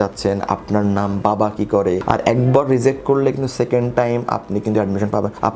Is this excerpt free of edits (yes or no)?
no